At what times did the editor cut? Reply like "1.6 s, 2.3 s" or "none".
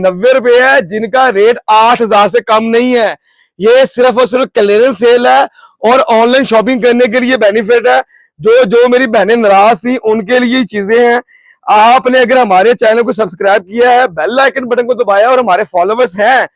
none

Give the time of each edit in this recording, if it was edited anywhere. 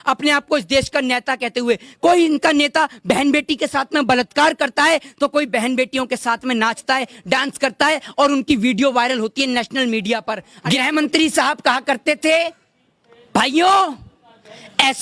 10.5 s

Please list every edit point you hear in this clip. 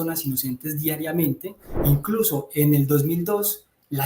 1.7 s

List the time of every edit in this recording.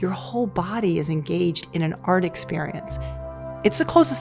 3.1 s

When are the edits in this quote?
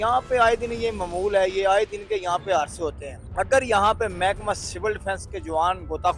none

